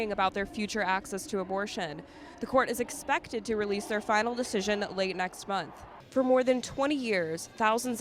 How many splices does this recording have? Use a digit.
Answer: 1